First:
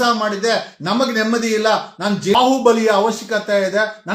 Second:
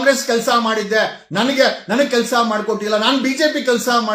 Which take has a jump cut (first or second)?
first